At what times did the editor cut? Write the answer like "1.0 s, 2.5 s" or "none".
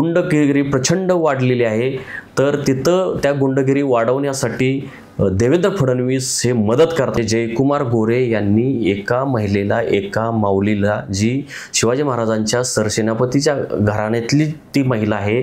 7.1 s